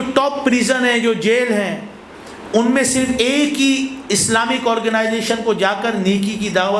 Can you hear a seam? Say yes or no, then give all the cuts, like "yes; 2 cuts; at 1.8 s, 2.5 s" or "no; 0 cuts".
no; 0 cuts